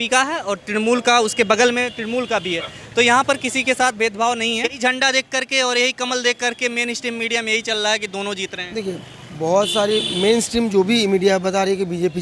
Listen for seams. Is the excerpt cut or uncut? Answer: cut